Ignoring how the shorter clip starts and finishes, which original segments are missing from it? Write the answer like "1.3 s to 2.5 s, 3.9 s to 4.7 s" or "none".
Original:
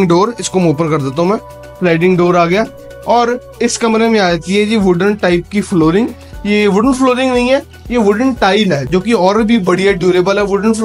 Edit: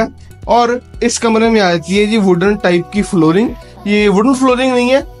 none